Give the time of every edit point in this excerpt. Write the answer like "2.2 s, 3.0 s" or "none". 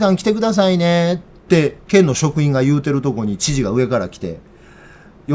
none